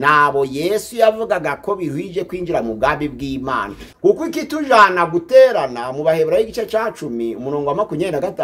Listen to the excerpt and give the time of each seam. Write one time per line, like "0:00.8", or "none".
0:03.8